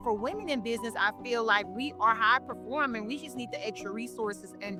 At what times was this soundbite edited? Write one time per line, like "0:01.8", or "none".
none